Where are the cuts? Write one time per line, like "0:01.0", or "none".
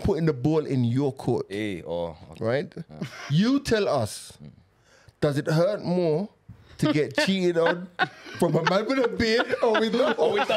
none